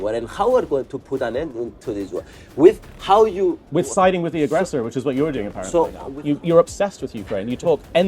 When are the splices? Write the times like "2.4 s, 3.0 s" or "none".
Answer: 6.1 s